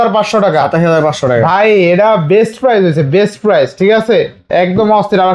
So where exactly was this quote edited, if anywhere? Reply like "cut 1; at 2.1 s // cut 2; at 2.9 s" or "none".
none